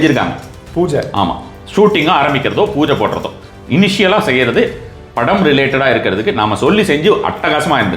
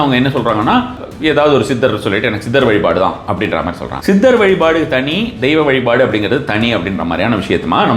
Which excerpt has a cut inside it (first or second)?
second